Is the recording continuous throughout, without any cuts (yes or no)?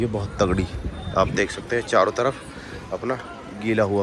yes